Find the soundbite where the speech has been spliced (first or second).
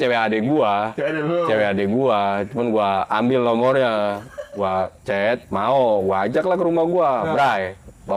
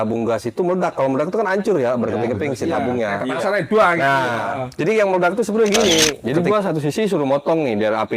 second